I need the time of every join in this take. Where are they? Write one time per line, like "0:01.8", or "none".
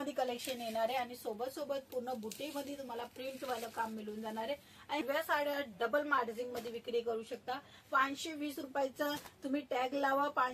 0:05.0